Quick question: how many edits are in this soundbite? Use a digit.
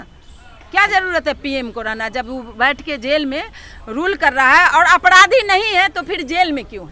0